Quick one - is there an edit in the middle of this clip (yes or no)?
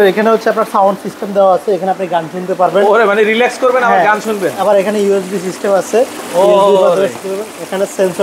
no